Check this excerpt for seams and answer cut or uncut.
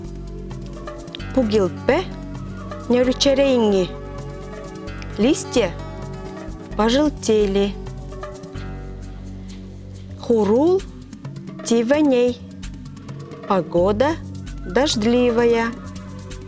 cut